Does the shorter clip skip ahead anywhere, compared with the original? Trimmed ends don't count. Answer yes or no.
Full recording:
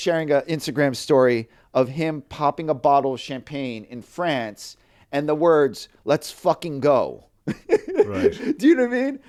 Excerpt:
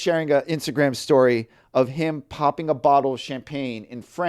no